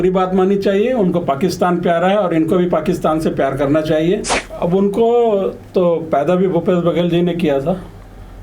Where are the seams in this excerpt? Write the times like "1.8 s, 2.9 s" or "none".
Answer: 4.3 s

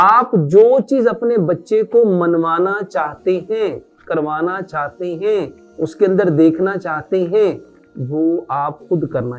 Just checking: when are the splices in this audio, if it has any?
5.6 s

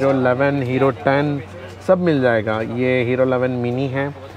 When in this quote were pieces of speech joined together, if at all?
none

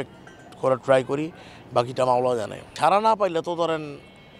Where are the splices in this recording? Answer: 2.6 s

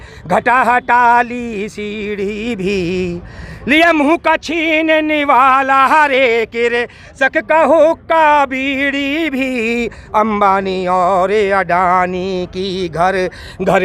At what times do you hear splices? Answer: none

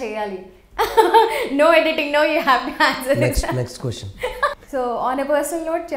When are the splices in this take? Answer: 4.5 s

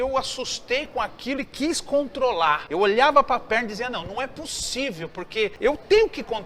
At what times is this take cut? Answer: 2.7 s, 5.5 s

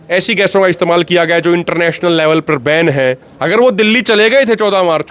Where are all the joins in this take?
3.3 s

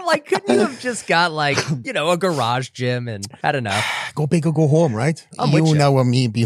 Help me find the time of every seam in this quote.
1.8 s, 3.2 s, 5.3 s

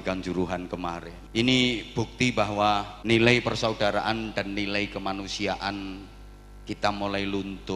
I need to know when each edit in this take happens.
1.1 s, 2.9 s

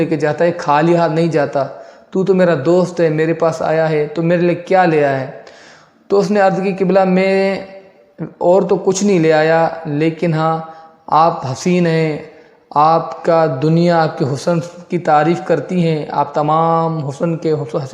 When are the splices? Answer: none

